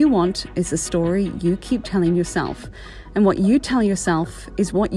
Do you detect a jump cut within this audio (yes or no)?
no